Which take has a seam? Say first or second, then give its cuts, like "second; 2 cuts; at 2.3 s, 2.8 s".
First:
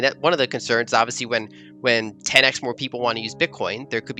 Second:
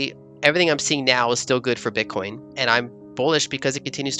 second; 1 cut; at 2.4 s